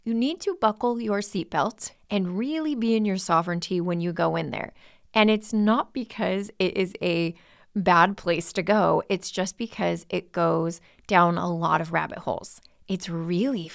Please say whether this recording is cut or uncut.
cut